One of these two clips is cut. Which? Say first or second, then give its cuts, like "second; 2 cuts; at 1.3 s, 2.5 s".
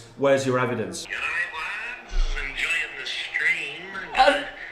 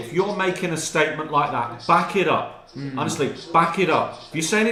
first; 1 cut; at 1.0 s